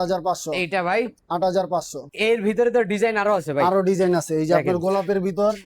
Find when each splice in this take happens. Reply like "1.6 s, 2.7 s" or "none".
2.0 s